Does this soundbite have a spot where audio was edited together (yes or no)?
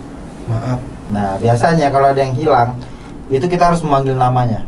yes